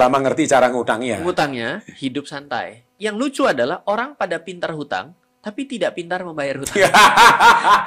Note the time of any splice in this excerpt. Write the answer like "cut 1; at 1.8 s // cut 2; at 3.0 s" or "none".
cut 1; at 2.9 s